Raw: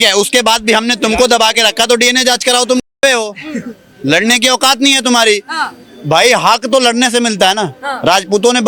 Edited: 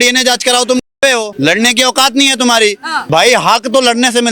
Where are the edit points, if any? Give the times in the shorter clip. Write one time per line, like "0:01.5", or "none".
0:01.3
0:02.9